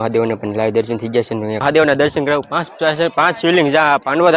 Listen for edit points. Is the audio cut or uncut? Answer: cut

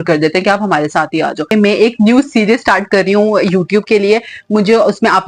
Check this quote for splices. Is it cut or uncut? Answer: cut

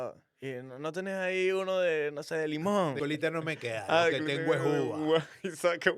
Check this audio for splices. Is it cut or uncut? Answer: cut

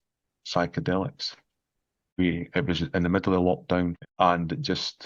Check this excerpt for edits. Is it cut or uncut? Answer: cut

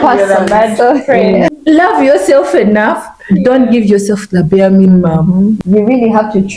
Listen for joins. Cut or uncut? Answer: cut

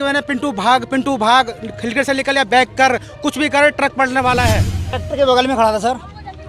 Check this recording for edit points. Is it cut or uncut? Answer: cut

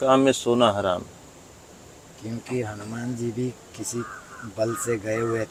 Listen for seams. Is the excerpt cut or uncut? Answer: uncut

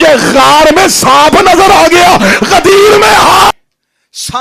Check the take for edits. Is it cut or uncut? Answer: cut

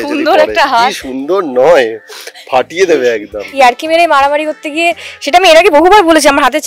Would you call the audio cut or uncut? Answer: cut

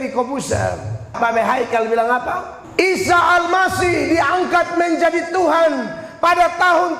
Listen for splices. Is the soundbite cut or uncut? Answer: cut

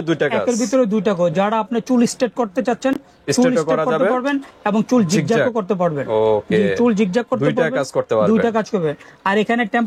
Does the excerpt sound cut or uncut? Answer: uncut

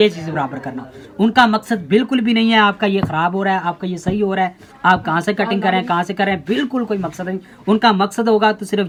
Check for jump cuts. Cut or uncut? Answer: uncut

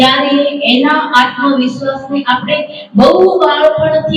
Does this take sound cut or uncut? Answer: uncut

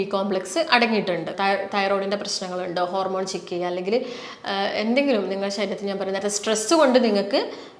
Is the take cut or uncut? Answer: cut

